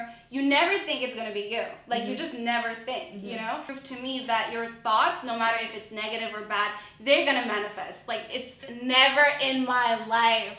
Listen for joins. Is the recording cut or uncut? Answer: cut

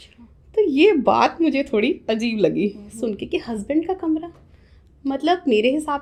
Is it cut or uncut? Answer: uncut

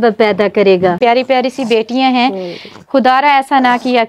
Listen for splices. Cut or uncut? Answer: cut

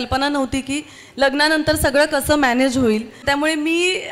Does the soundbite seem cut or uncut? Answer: cut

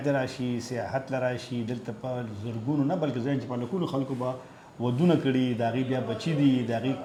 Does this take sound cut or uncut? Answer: uncut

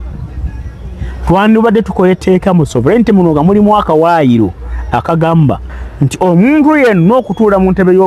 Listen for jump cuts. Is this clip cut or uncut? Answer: uncut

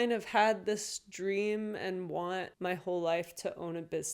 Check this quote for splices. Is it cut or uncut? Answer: cut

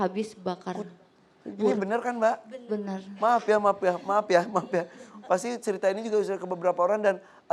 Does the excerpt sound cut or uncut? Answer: cut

